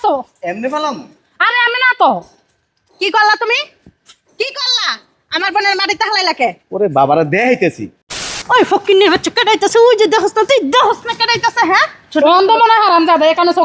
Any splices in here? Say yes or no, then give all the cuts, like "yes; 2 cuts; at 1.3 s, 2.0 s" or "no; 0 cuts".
yes; 1 cut; at 8.4 s